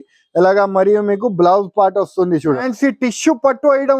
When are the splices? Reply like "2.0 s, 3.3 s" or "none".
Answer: 2.6 s